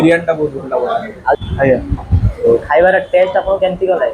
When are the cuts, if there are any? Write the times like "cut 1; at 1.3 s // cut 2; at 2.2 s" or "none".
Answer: cut 1; at 1.4 s